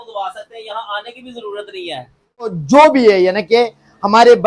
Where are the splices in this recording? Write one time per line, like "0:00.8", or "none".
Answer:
0:02.6